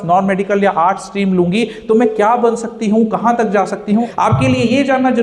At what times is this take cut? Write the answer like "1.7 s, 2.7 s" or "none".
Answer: 4.1 s